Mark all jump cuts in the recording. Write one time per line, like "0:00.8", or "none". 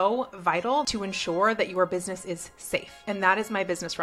0:00.9
0:02.9